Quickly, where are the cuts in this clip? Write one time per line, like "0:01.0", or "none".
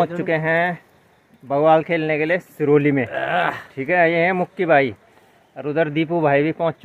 none